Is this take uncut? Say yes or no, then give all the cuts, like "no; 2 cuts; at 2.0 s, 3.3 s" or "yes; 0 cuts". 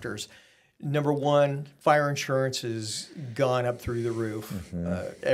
yes; 0 cuts